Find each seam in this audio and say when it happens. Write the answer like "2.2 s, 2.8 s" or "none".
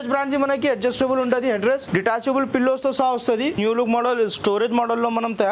3.6 s